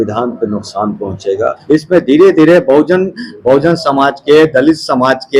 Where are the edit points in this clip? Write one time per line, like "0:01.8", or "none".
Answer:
0:01.6